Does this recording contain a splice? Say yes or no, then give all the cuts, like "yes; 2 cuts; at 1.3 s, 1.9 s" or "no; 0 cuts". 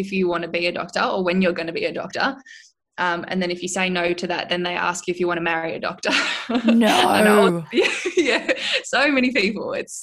no; 0 cuts